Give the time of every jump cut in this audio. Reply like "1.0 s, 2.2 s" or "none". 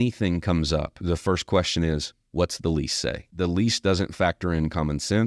1.0 s, 3.2 s